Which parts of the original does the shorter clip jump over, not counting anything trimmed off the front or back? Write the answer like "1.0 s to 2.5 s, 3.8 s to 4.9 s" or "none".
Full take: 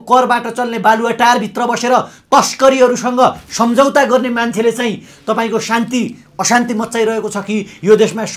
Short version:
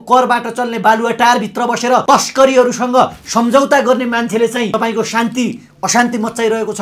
2.0 s to 2.3 s, 4.9 s to 5.3 s